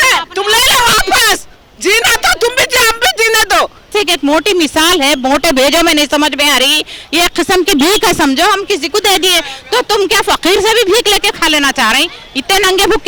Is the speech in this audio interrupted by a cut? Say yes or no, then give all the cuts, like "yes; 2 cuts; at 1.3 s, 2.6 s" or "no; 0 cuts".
yes; 1 cut; at 3.9 s